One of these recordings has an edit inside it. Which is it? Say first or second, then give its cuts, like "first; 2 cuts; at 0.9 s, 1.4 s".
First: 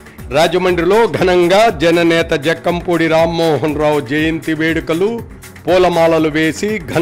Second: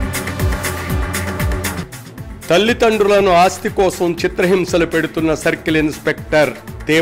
second; 1 cut; at 1.7 s